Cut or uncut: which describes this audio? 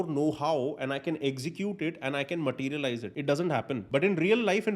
cut